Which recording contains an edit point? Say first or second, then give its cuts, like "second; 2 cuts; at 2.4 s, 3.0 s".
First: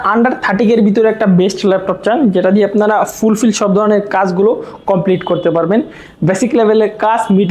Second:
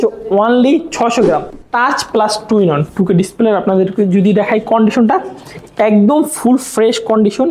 second; 1 cut; at 1.7 s